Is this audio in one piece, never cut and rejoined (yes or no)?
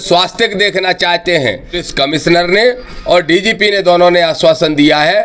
no